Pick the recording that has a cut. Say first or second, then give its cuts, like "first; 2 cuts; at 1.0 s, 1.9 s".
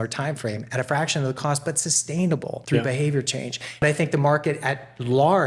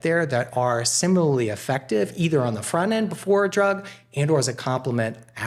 first; 2 cuts; at 2.6 s, 3.8 s